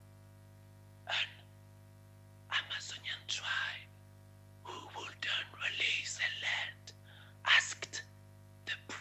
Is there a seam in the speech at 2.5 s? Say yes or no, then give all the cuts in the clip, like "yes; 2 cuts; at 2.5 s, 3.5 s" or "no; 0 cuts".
no; 1 cut; at 1.0 s